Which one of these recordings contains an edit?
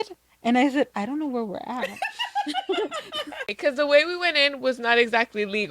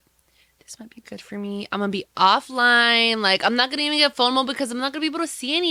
first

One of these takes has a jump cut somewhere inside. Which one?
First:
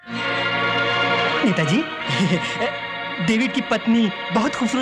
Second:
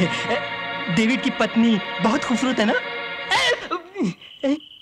first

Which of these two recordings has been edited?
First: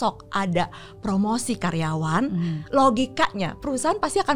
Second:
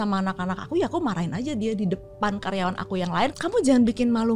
second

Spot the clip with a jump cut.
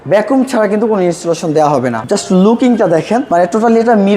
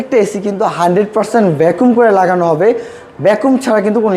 first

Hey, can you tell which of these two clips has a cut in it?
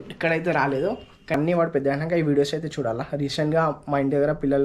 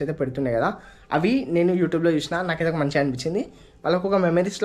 first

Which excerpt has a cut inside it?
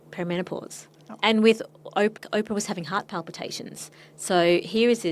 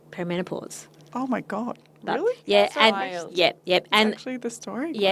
first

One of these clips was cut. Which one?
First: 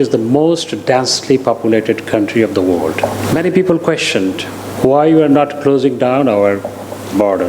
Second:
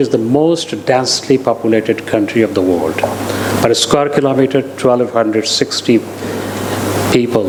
first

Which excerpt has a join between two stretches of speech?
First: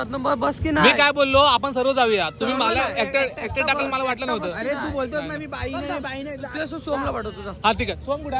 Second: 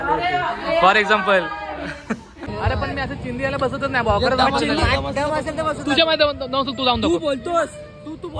second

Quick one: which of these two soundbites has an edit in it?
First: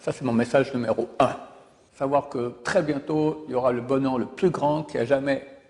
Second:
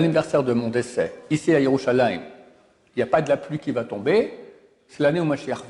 first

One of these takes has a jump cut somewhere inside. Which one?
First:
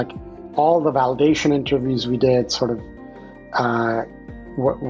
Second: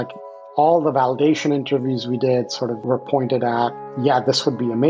second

